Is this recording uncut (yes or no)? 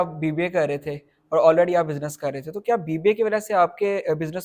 yes